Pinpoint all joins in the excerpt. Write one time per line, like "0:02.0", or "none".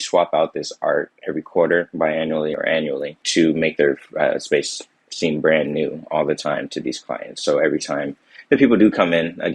0:03.2